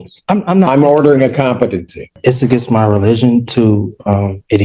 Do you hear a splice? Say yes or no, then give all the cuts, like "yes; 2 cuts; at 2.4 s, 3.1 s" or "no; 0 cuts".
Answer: yes; 1 cut; at 2.1 s